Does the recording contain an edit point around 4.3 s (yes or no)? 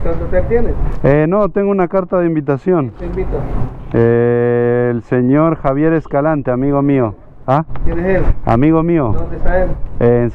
no